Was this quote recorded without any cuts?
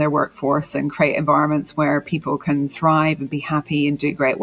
yes; 0 cuts

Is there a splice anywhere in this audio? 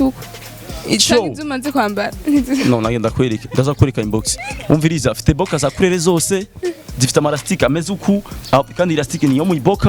no; 0 cuts

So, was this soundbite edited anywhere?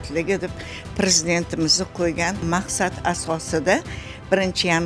yes; 1 cut; at 2.4 s

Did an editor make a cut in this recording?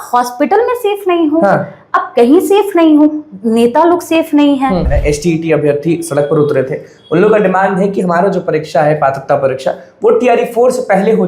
yes; 1 cut; at 4.9 s

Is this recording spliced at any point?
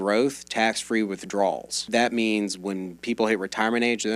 yes; 1 cut; at 1.8 s

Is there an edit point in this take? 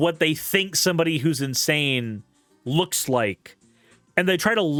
no; 0 cuts

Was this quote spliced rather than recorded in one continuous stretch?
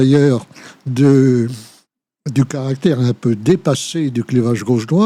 no; 0 cuts

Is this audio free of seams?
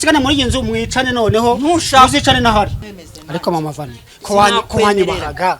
no; 1 cut; at 2.9 s

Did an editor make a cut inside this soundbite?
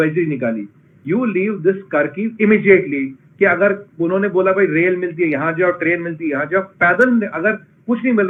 no; 0 cuts

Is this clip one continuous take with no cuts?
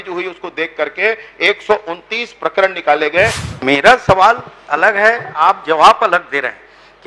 no; 1 cut; at 3.5 s

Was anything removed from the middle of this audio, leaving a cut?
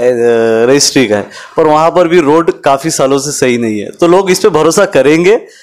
no; 0 cuts

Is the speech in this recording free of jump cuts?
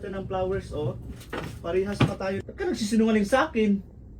no; 1 cut; at 2.4 s

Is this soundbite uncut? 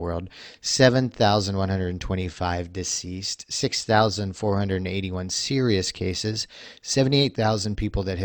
yes; 0 cuts

